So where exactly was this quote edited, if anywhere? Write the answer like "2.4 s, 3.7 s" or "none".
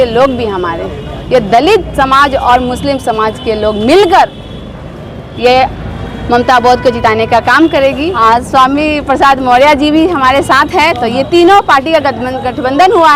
8.2 s